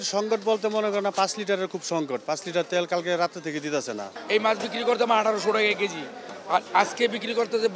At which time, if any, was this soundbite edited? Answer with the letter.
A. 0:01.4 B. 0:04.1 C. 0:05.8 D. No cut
B